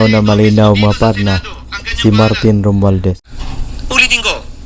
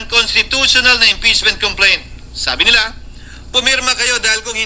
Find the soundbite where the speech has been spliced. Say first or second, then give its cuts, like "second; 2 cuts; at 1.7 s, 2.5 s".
first; 1 cut; at 3.3 s